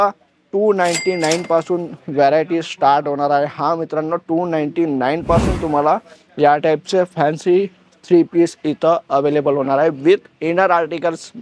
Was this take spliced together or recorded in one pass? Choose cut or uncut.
uncut